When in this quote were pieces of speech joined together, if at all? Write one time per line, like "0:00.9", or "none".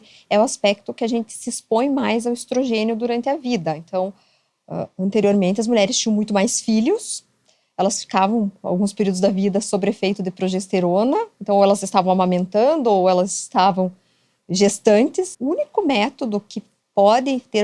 0:15.3